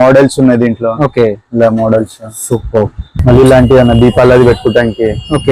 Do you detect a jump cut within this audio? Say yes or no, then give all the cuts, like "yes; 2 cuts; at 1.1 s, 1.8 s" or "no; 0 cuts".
yes; 1 cut; at 3.1 s